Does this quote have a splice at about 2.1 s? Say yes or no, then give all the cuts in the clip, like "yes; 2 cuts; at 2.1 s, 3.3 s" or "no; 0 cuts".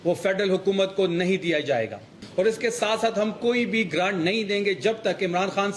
yes; 1 cut; at 2.1 s